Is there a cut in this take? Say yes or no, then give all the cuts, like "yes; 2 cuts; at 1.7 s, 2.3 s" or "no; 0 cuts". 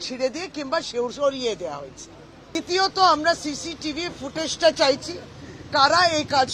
yes; 1 cut; at 2.6 s